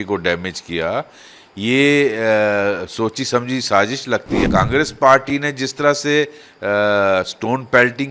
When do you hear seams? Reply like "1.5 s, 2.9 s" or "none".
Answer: 4.4 s